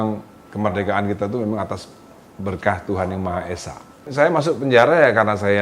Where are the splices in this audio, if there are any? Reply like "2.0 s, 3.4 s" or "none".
4.1 s